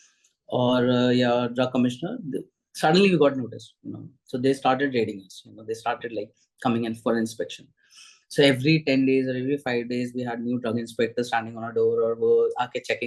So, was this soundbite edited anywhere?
no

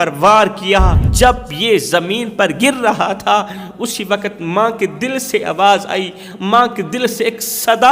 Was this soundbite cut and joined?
yes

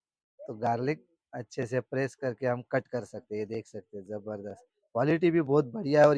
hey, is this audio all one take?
yes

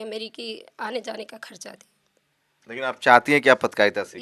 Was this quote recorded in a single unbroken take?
yes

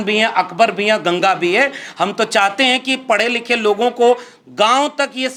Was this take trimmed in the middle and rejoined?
no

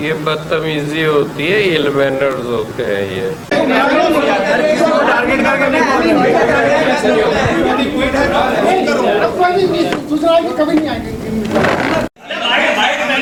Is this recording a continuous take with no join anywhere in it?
yes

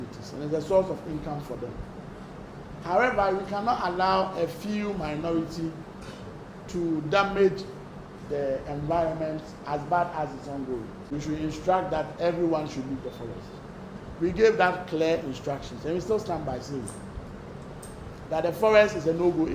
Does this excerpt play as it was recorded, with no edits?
no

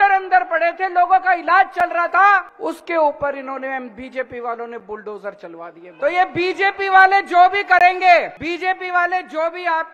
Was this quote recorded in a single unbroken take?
no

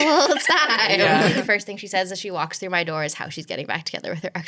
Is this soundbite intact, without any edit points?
no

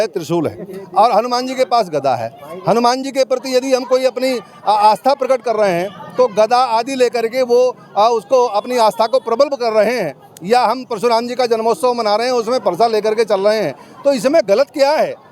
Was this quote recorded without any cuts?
yes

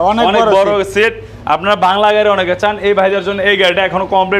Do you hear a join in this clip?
no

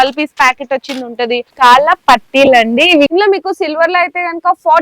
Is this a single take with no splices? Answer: no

